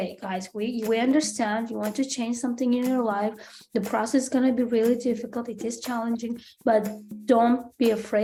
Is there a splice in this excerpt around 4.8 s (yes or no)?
no